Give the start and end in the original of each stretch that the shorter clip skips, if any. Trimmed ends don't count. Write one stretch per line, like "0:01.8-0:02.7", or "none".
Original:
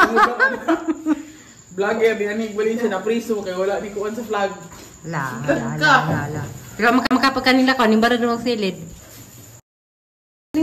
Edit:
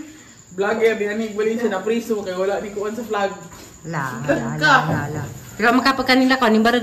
0:07.0-0:07.2